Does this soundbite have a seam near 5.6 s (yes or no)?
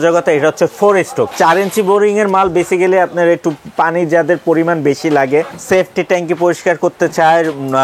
yes